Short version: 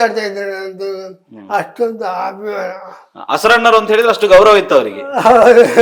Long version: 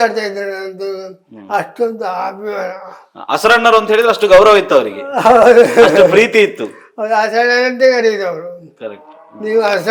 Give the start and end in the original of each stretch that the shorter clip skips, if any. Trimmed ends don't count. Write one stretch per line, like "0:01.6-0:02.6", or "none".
none